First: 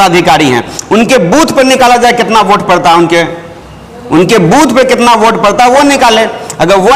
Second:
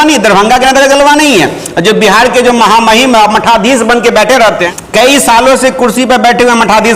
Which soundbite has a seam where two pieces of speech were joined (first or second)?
second